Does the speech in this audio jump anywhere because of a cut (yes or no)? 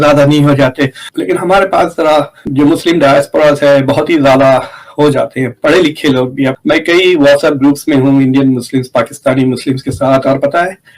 yes